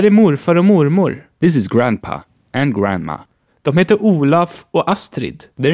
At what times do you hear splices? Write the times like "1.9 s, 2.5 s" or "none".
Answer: none